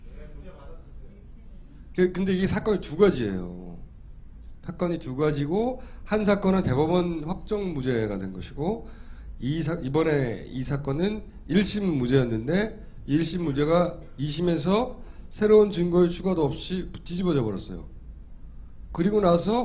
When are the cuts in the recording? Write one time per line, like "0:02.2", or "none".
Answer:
0:08.8